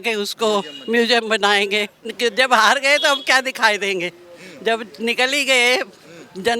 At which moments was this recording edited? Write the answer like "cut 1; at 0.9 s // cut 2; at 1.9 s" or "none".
cut 1; at 2.0 s